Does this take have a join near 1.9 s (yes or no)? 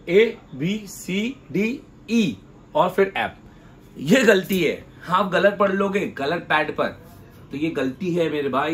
no